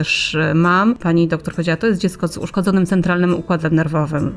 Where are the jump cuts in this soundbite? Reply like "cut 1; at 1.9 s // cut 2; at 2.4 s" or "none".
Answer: cut 1; at 1.0 s // cut 2; at 2.5 s